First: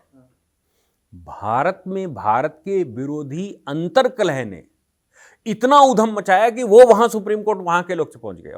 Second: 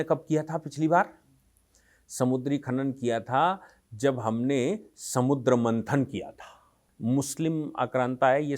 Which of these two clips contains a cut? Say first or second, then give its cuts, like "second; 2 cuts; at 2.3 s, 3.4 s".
second; 1 cut; at 6.8 s